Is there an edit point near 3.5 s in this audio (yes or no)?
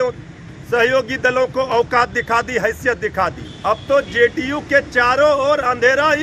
yes